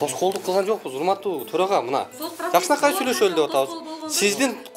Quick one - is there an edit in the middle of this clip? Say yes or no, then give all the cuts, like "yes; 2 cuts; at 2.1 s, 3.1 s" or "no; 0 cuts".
no; 0 cuts